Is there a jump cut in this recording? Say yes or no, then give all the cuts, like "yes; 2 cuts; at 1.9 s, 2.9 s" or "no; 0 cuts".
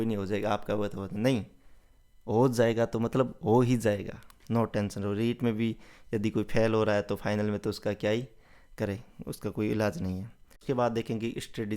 yes; 1 cut; at 10.6 s